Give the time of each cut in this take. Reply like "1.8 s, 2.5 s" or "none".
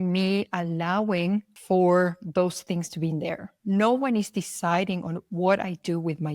1.5 s